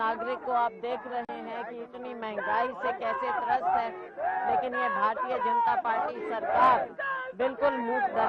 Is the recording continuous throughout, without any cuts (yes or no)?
yes